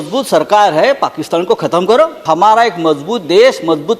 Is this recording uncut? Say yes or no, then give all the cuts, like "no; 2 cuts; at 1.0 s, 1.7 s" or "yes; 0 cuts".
no; 1 cut; at 2.2 s